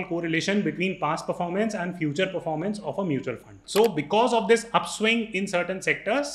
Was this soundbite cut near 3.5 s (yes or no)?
yes